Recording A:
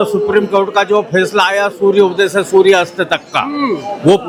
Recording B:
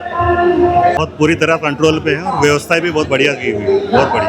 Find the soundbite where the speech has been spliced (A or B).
B